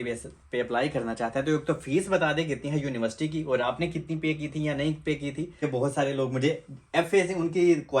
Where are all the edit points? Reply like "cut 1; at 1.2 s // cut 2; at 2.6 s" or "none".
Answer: cut 1; at 5.6 s